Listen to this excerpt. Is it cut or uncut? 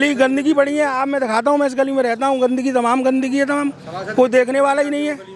uncut